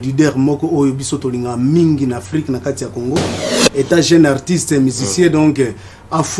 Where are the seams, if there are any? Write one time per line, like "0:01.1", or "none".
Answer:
0:03.6